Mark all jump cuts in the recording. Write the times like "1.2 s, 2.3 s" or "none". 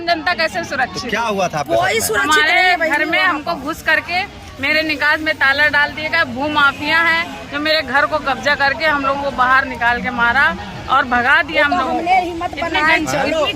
none

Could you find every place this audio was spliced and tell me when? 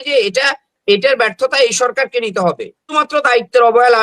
2.9 s

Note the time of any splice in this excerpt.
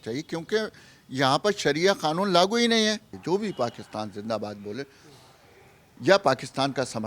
3.1 s

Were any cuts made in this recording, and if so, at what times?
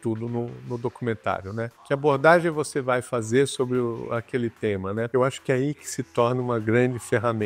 1.8 s, 5.1 s

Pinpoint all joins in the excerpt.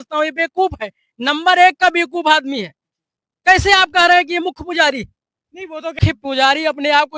6.0 s

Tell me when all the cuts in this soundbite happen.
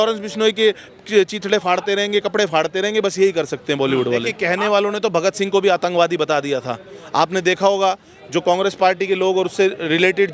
4.3 s

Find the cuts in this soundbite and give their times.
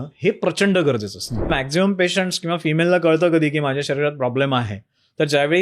1.5 s

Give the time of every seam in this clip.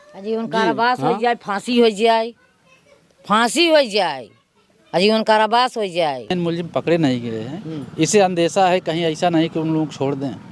6.3 s

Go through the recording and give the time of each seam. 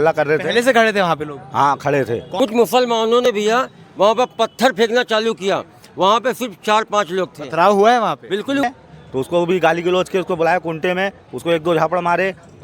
2.3 s, 8.6 s

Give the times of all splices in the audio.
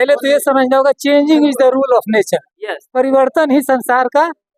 none

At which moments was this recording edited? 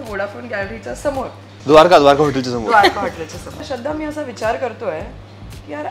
1.5 s, 3.6 s

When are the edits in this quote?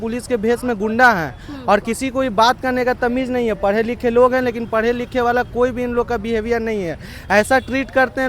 none

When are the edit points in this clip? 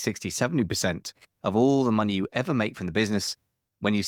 none

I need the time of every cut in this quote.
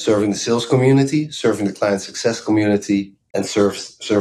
3.2 s

